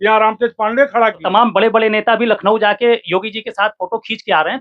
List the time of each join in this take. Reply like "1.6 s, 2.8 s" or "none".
1.2 s